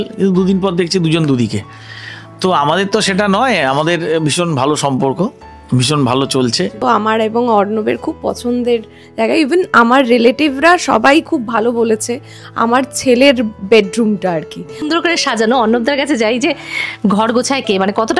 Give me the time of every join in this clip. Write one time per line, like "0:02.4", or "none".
0:06.8
0:14.9